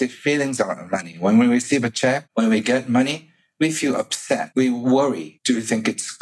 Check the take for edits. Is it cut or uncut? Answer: cut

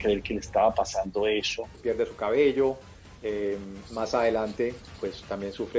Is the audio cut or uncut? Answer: cut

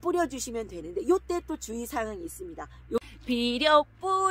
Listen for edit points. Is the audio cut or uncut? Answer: cut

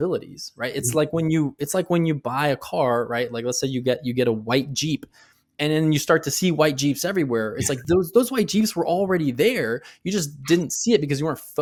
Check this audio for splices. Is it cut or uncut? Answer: uncut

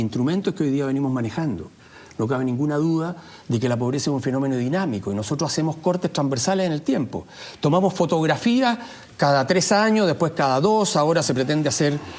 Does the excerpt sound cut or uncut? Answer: uncut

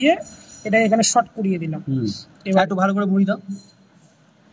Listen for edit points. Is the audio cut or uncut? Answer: uncut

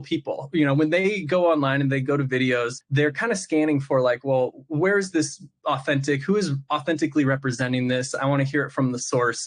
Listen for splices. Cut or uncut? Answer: cut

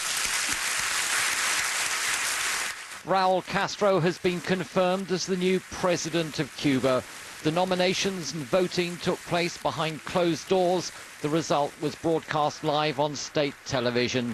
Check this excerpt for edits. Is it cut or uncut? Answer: cut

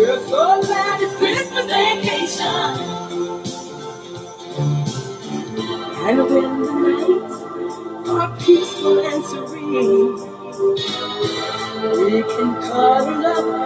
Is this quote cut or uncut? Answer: uncut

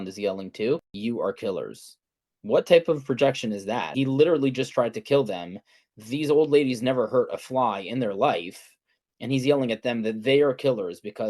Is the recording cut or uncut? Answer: cut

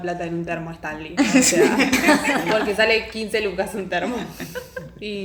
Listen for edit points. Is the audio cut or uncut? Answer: uncut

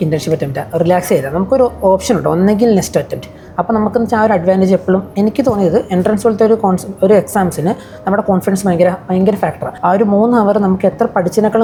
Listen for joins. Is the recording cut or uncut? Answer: uncut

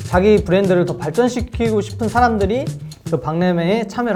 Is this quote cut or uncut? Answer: uncut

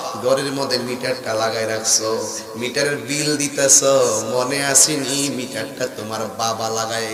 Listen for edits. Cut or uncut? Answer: uncut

